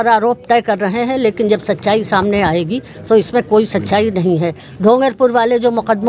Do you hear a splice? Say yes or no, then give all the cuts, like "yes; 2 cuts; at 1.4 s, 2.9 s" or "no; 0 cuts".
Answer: no; 0 cuts